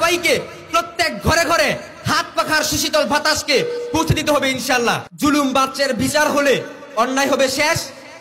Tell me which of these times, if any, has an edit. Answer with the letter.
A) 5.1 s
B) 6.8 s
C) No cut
A